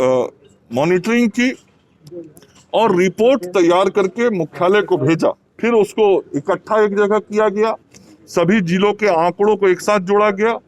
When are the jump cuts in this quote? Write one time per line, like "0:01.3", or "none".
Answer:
0:05.5